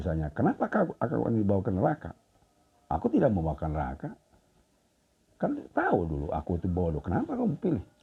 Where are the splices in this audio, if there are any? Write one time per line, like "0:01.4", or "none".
none

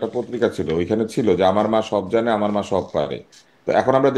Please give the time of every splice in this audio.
none

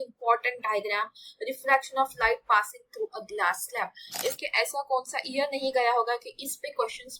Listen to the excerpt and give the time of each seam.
0:04.4

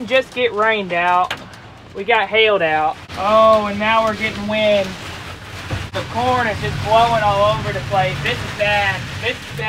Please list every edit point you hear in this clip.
0:03.1
0:05.8

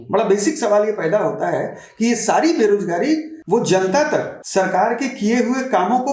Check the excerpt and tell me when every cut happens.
0:03.3
0:04.4

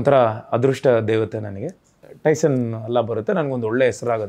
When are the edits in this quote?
0:02.0

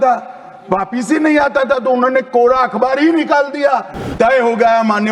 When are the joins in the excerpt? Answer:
0:04.1

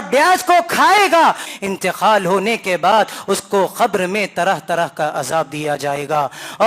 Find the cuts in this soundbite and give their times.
0:01.5

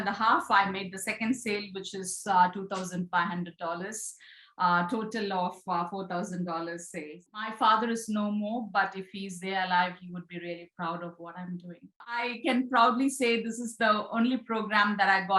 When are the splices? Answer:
0:07.5
0:12.3

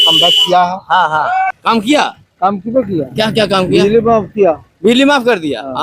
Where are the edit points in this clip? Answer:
0:01.6

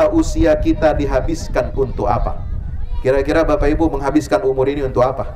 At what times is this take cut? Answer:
none

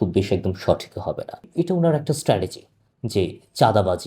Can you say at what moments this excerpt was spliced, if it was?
0:01.5

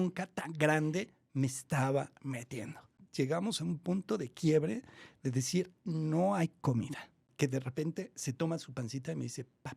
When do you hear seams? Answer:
0:03.0
0:07.2

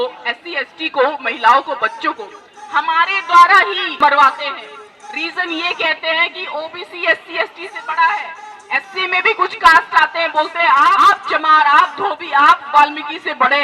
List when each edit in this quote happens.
0:03.9
0:11.0

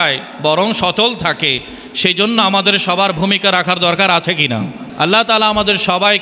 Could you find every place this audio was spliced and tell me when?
0:04.8

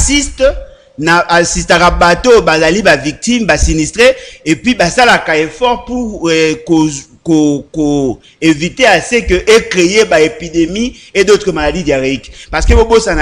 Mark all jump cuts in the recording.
none

